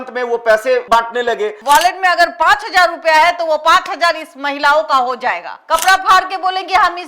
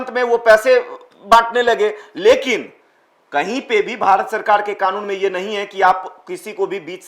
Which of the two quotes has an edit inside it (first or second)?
first